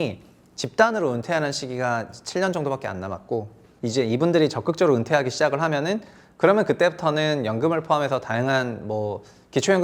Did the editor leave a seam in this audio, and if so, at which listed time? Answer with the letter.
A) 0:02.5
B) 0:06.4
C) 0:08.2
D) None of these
D